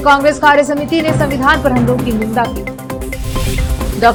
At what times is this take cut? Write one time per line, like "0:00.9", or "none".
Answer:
none